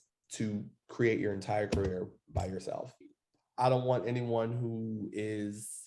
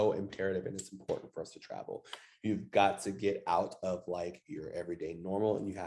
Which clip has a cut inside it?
first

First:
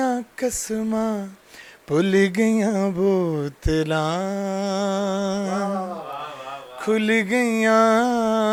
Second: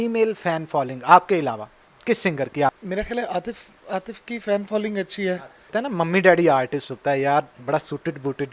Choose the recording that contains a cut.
second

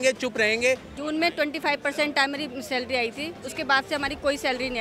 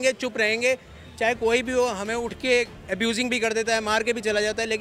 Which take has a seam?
first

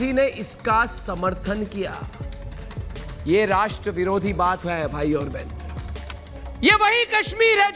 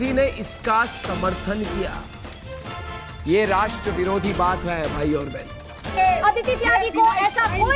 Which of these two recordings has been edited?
second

